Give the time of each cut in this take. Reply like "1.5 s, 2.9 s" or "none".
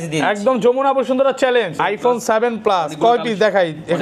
1.7 s